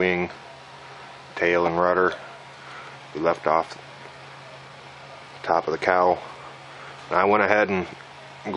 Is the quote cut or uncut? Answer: uncut